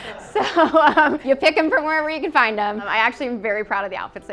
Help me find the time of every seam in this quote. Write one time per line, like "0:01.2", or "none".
0:01.2
0:02.9